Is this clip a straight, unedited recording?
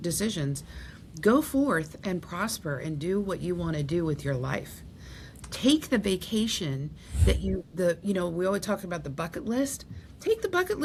yes; 0 cuts

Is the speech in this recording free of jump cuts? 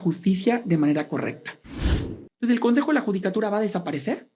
no; 1 cut; at 1.9 s

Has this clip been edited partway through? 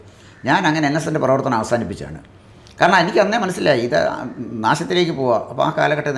no; 0 cuts

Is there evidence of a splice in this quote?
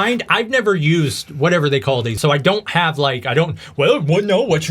yes; 1 cut; at 2.2 s

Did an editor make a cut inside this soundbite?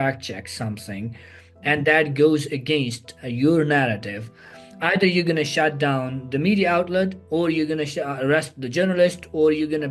no; 0 cuts

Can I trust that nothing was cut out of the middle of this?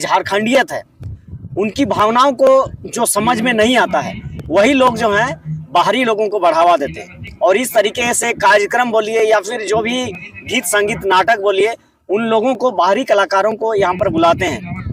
yes; 0 cuts

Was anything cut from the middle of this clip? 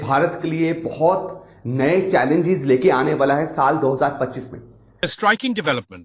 yes; 1 cut; at 5.1 s

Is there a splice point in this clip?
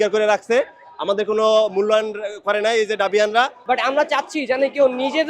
yes; 1 cut; at 3.6 s

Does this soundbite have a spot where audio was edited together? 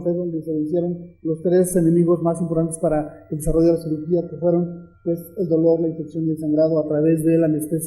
yes; 1 cut; at 2.4 s

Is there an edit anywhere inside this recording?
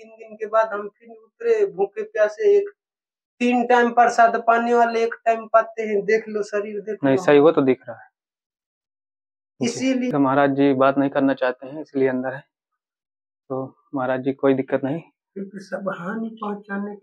yes; 1 cut; at 10.1 s

